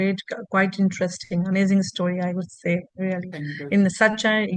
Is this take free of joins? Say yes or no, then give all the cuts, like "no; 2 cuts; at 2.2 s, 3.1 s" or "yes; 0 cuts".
yes; 0 cuts